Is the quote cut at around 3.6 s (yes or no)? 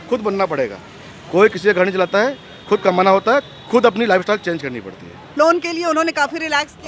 no